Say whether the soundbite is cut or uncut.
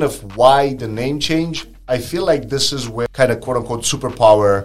cut